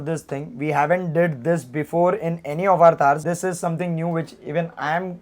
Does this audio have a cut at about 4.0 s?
no; 0 cuts

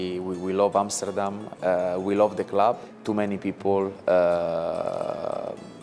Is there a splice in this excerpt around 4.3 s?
no; 1 cut; at 2.9 s

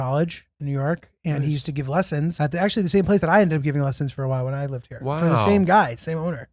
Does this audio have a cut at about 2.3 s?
yes; 1 cut; at 2.3 s

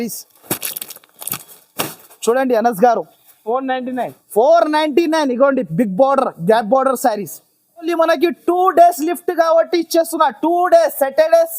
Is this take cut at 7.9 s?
yes; 1 cut; at 7.9 s

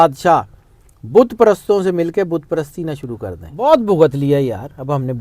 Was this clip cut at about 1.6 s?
no; 1 cut; at 3.4 s

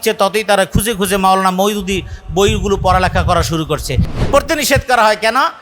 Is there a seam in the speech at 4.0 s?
yes; 1 cut; at 4.0 s

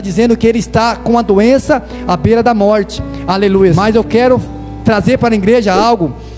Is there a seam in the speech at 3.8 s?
yes; 1 cut; at 3.8 s

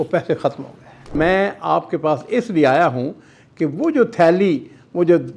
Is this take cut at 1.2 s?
yes; 1 cut; at 1.2 s

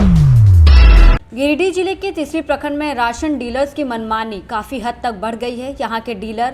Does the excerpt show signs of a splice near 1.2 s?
yes; 1 cut; at 1.2 s

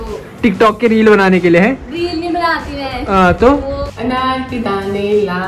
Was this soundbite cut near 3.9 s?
yes; 1 cut; at 3.9 s

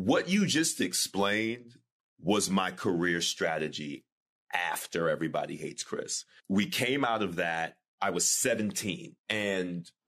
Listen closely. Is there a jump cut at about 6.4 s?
yes; 2 cuts; at 6.4 s, 9.1 s

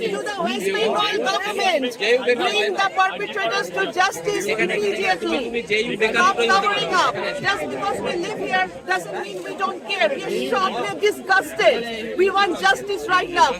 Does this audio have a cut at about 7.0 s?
no; 0 cuts

